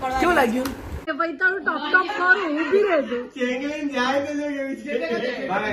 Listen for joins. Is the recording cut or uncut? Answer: cut